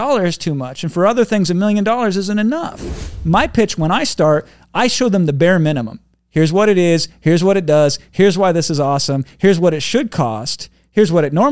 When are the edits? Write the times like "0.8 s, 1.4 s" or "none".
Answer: 3.1 s